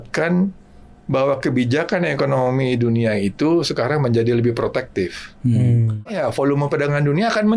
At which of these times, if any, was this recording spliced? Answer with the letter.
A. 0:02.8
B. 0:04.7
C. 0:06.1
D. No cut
C